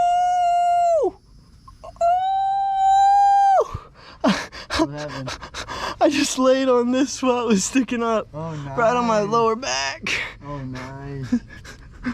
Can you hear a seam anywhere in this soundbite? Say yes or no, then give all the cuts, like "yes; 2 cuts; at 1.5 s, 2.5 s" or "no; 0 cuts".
no; 0 cuts